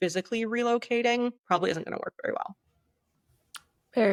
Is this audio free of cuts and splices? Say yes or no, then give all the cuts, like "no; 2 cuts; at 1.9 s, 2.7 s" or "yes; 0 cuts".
yes; 0 cuts